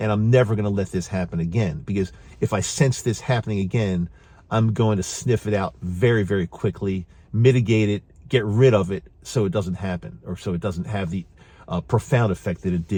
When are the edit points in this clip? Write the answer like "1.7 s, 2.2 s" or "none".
none